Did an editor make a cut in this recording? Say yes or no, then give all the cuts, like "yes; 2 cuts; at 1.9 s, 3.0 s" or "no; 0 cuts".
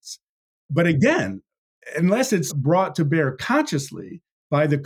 yes; 1 cut; at 2.5 s